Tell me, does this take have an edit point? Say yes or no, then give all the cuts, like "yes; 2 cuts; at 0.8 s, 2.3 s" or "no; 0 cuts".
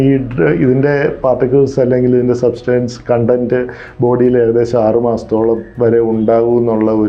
no; 0 cuts